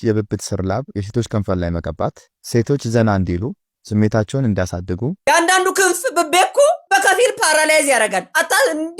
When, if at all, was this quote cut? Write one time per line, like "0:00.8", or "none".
0:05.2